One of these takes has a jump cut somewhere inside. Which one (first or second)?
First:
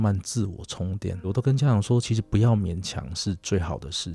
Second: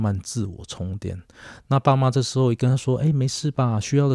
first